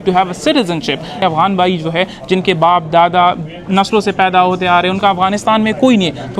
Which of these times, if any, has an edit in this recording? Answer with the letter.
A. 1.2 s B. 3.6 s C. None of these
A